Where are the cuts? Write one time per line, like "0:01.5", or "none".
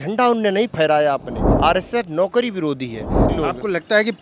0:01.4
0:03.2